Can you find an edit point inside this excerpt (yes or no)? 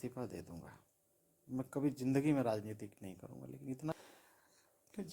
yes